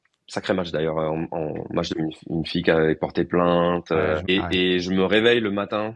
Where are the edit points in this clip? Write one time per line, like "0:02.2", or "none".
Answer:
0:01.9
0:04.3